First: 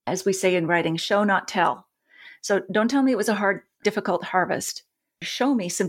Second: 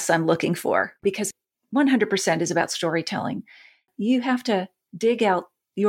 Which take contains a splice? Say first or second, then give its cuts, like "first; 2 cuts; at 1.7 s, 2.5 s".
second; 3 cuts; at 0.9 s, 3.8 s, 4.8 s